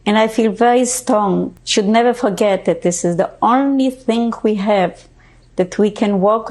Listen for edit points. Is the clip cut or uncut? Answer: cut